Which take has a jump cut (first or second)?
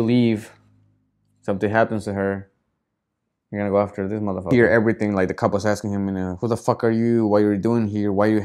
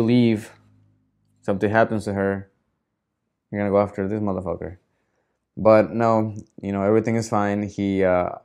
first